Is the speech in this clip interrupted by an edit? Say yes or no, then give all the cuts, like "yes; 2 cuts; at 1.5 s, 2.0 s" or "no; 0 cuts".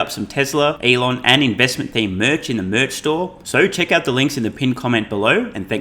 yes; 2 cuts; at 0.8 s, 3.4 s